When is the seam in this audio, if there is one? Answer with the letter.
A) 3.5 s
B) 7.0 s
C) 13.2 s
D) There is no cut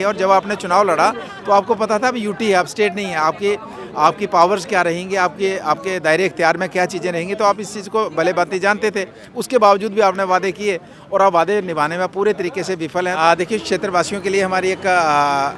C